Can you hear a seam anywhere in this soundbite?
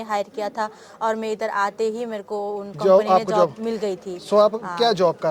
no; 0 cuts

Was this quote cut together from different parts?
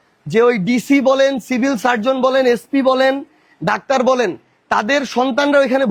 no; 0 cuts

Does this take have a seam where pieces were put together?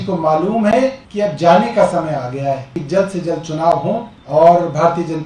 yes; 3 cuts; at 1.0 s, 2.8 s, 4.1 s

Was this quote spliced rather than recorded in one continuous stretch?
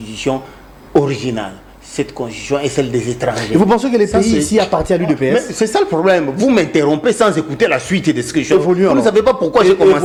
no; 0 cuts

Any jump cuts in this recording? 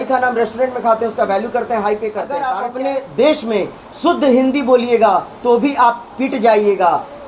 yes; 1 cut; at 2.5 s

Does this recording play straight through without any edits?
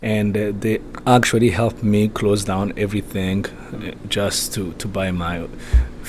no; 1 cut; at 0.9 s

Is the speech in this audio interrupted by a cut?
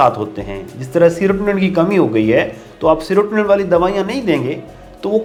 no; 0 cuts

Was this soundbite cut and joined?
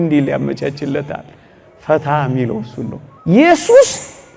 yes; 1 cut; at 3.0 s

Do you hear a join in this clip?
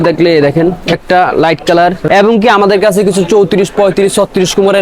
yes; 2 cuts; at 0.9 s, 2.0 s

